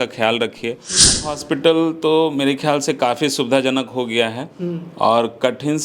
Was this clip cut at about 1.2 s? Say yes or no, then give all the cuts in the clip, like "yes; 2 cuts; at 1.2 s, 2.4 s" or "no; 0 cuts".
yes; 1 cut; at 1.2 s